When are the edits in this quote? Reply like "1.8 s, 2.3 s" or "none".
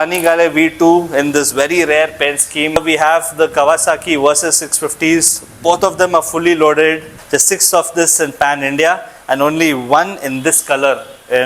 2.8 s, 7.2 s